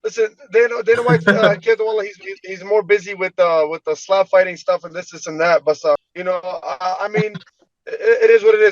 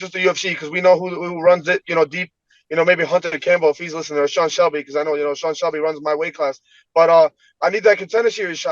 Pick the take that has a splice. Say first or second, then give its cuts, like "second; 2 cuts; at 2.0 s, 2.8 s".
first; 1 cut; at 6.1 s